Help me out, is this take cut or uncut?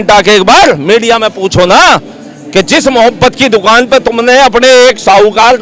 uncut